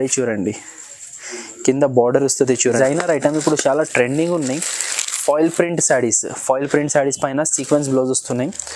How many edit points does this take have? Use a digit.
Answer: 1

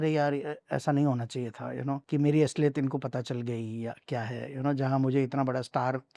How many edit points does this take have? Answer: 1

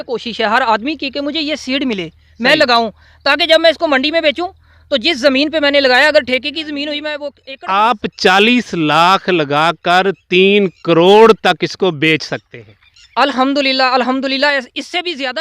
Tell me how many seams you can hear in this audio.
1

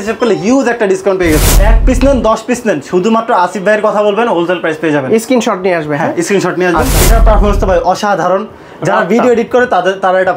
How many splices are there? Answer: 2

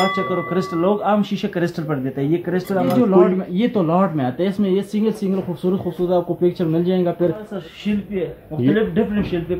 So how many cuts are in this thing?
2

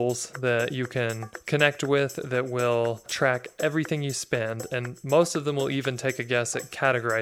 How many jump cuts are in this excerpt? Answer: 2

